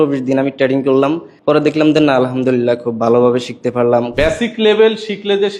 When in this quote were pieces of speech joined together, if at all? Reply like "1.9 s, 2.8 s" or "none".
1.3 s, 4.1 s